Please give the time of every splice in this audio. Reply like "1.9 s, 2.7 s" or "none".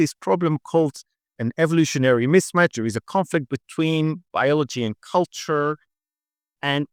none